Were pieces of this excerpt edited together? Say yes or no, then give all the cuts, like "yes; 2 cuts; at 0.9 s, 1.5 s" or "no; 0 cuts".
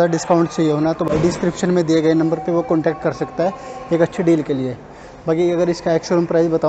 no; 0 cuts